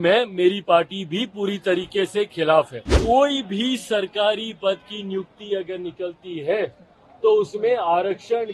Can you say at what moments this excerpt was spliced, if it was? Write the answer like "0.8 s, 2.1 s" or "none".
2.9 s